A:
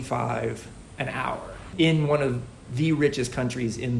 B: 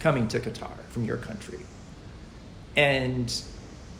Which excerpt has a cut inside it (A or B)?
A